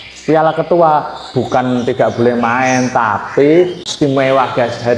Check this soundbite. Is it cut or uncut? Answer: cut